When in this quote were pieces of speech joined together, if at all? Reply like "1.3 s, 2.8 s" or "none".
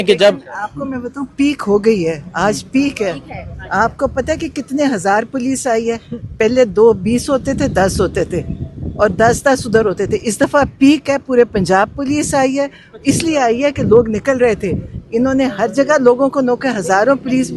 none